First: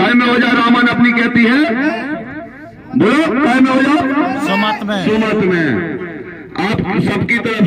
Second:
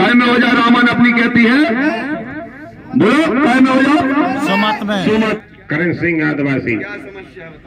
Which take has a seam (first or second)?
second